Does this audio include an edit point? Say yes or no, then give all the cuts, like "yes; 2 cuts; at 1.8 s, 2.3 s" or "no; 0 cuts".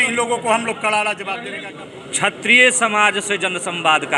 yes; 1 cut; at 1.5 s